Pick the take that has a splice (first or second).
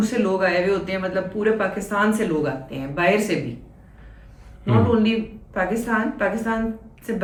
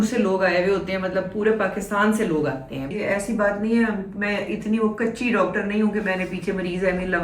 second